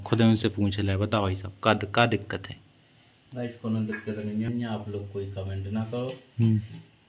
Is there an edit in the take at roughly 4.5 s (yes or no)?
yes